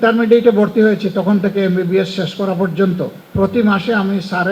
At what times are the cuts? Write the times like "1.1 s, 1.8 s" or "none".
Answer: 3.2 s

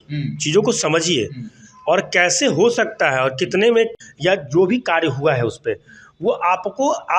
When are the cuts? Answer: 4.0 s

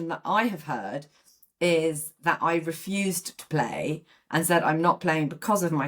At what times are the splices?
none

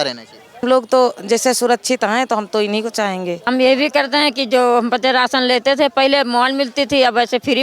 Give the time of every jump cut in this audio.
3.5 s

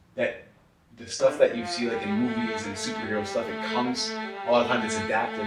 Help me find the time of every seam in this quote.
none

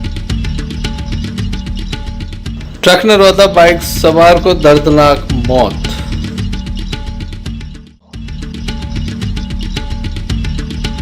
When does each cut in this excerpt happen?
1.7 s

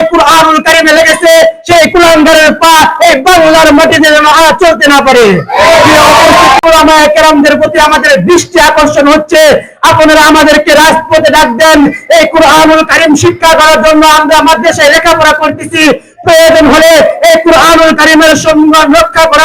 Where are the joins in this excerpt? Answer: 6.6 s

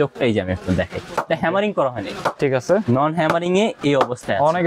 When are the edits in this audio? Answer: none

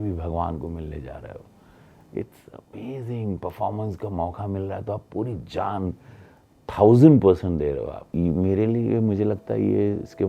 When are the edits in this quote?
8.0 s

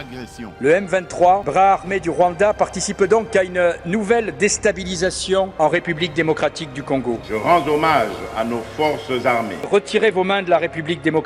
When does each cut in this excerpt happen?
9.6 s

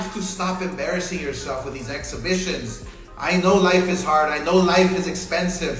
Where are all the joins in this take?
none

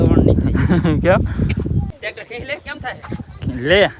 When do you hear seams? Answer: 1.9 s

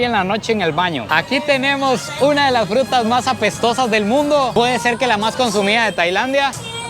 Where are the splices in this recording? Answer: 1.1 s

